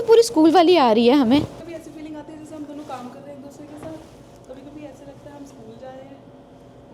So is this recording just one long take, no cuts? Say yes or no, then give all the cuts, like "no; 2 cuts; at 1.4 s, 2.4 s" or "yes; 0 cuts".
yes; 0 cuts